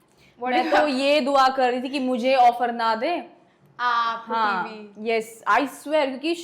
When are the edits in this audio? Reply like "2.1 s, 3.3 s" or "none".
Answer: none